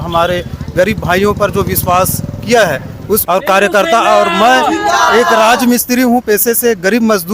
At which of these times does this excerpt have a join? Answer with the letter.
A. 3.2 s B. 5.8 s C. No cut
A